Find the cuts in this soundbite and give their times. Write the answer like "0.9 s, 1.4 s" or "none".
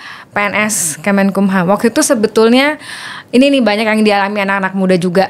none